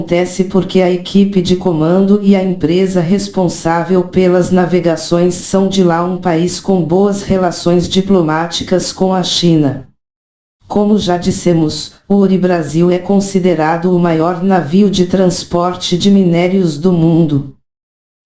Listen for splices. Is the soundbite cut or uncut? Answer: uncut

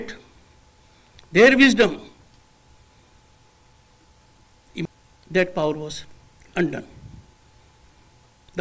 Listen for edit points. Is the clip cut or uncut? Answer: cut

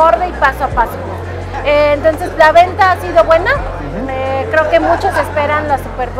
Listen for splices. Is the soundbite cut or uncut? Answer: uncut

